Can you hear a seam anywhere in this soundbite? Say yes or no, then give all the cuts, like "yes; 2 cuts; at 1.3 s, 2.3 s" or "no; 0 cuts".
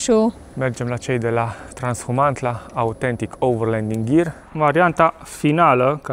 yes; 1 cut; at 4.4 s